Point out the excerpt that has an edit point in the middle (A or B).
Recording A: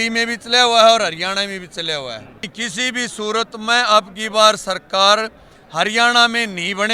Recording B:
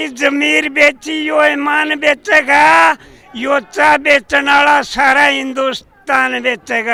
A